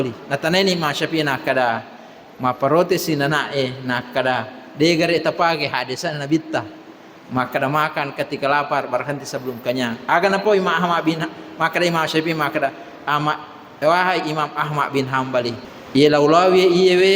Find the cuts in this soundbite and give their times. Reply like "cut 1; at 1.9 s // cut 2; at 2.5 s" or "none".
cut 1; at 15.7 s